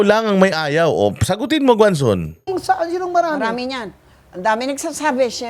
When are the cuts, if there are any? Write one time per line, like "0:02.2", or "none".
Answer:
none

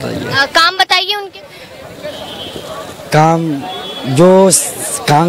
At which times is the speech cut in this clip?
none

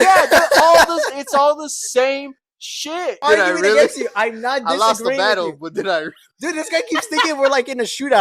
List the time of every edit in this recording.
0:03.2

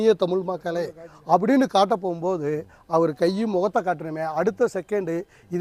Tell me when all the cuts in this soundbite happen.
none

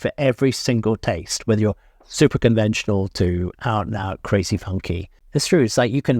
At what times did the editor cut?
0:05.1

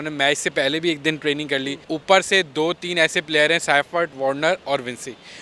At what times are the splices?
0:01.8

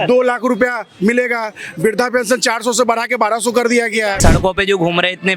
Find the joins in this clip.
0:04.2

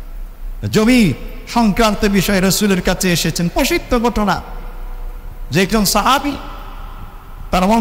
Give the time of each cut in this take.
none

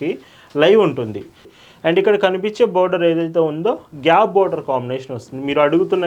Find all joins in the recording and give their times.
0:01.5

